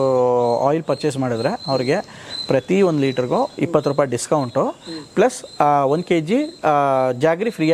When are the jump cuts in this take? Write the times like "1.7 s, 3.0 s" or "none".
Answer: none